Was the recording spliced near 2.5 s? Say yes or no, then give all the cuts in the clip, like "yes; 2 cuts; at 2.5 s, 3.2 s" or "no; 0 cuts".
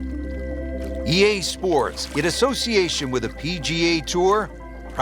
no; 1 cut; at 1.1 s